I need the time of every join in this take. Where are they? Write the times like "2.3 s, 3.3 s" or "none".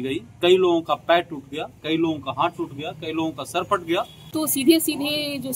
4.2 s